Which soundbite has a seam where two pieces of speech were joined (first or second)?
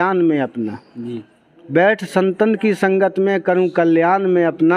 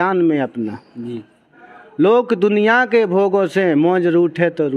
second